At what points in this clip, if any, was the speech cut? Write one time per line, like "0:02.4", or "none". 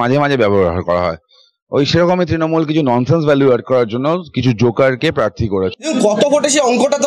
0:05.8